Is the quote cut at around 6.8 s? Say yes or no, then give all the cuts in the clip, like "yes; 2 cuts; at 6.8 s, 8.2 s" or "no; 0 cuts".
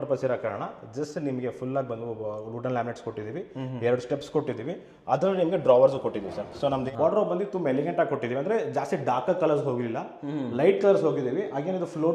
yes; 1 cut; at 6.8 s